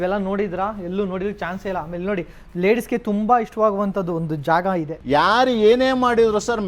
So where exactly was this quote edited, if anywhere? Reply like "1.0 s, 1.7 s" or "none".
4.9 s